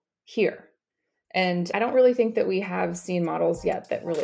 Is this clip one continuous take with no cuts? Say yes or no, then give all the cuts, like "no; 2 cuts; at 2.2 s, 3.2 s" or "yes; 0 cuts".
no; 1 cut; at 1.7 s